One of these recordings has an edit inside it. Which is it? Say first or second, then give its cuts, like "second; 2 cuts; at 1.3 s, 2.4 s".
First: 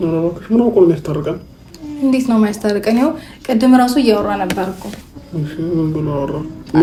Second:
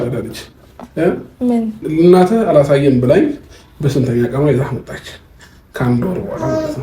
second; 1 cut; at 1.9 s